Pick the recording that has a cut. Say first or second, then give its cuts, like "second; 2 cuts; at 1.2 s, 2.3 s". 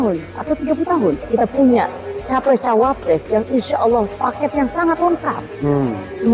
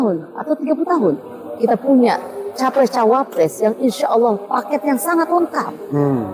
first; 1 cut; at 1.2 s